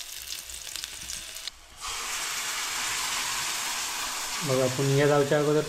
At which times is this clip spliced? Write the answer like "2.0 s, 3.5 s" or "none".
1.5 s